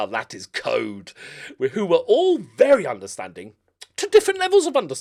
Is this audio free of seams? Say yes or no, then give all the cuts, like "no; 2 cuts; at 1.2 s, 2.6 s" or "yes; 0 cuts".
yes; 0 cuts